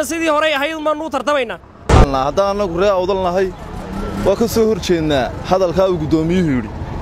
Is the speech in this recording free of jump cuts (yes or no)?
no